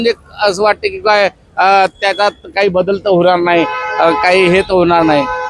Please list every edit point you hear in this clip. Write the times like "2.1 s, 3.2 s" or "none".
none